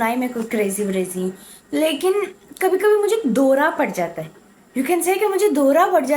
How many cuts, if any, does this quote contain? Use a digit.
0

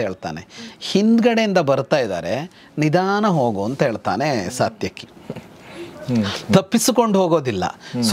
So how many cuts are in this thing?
0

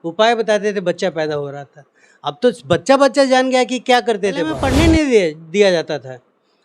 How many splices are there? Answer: 1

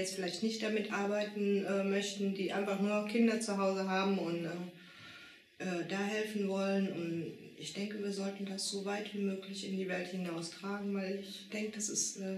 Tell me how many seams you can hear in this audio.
0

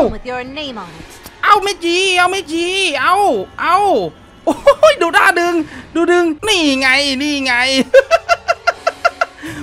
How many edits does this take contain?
1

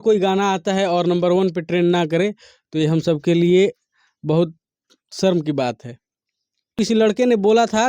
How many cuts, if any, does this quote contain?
1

